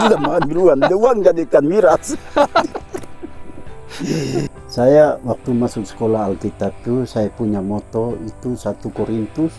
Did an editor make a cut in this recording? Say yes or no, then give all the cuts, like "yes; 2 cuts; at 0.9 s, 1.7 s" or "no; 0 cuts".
yes; 1 cut; at 4.5 s